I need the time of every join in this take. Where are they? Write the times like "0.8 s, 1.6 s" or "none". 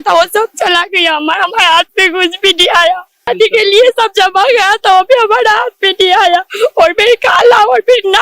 3.3 s